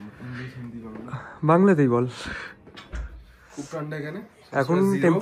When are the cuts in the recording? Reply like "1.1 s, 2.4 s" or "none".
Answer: 2.9 s

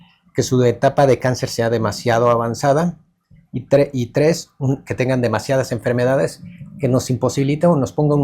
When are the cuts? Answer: none

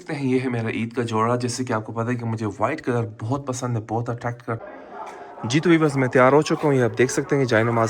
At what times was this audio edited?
4.6 s

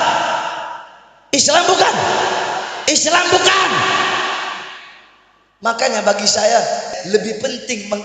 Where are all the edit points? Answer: 7.0 s

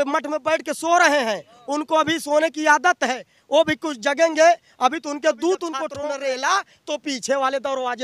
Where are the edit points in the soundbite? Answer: 5.9 s

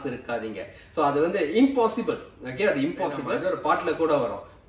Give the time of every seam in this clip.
3.7 s

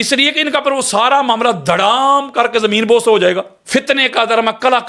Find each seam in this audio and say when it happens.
3.5 s

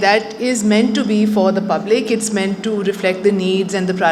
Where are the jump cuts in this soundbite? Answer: none

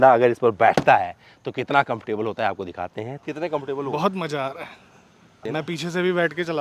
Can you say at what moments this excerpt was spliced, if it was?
3.2 s, 5.4 s

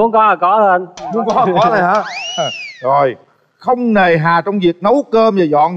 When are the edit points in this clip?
none

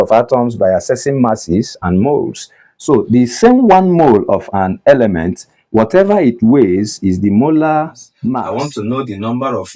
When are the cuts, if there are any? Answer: 8.4 s

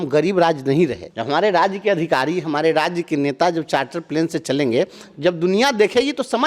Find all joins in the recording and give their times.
1.1 s

